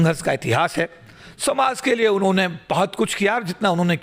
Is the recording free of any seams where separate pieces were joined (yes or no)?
yes